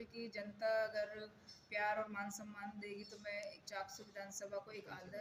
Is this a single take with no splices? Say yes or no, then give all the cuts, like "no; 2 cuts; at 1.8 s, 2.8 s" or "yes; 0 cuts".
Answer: yes; 0 cuts